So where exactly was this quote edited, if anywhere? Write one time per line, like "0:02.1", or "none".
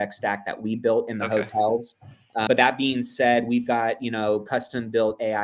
0:02.4